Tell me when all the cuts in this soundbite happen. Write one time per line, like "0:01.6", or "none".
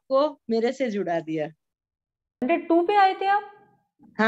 0:02.4